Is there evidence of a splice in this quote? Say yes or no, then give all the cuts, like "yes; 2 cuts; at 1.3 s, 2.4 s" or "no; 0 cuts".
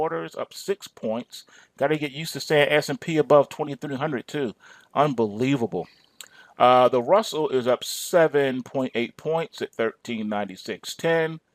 no; 0 cuts